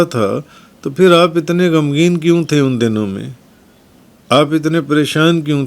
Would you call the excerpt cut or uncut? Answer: uncut